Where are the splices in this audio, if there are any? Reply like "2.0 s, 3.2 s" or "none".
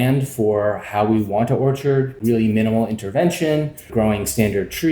2.2 s, 3.9 s